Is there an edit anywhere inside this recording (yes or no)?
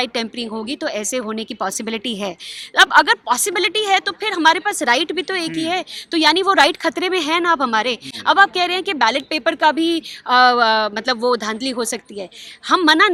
no